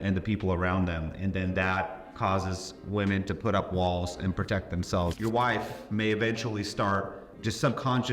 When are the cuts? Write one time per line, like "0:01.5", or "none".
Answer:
0:05.2